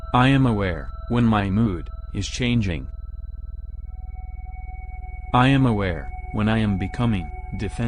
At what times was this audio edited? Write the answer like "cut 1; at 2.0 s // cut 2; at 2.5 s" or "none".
cut 1; at 1.1 s // cut 2; at 3.1 s // cut 3; at 5.3 s